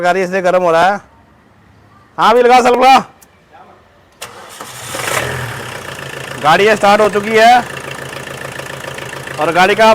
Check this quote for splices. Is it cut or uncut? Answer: uncut